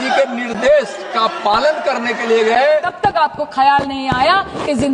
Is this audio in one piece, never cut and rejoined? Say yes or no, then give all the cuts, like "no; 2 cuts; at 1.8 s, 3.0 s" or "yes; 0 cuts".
no; 1 cut; at 2.9 s